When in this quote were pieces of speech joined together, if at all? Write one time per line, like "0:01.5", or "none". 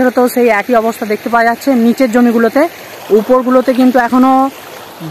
none